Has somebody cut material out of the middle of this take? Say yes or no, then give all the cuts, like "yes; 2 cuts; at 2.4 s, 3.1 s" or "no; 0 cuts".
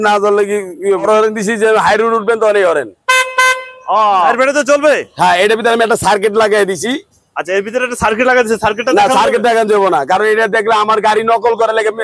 yes; 2 cuts; at 1.0 s, 4.3 s